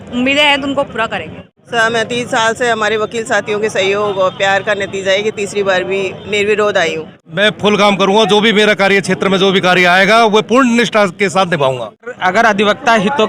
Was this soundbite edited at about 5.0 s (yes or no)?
no